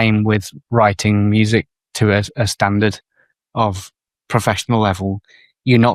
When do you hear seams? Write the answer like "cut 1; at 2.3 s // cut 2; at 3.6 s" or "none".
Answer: none